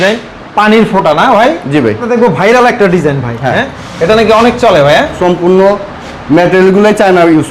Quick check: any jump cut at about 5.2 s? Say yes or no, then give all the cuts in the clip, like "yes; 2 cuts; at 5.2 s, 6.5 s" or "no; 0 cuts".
yes; 2 cuts; at 2.1 s, 5.2 s